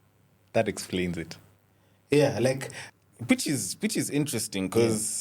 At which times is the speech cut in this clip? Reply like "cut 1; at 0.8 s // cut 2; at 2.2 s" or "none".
cut 1; at 2.7 s